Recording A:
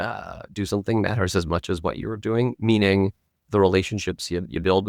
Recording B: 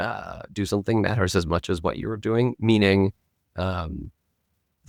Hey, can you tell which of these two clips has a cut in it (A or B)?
A